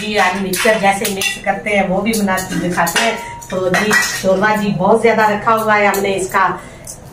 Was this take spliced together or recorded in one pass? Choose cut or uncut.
uncut